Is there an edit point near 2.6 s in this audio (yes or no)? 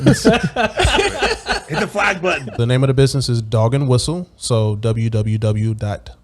yes